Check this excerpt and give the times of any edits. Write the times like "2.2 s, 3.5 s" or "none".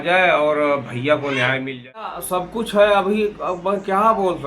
2.2 s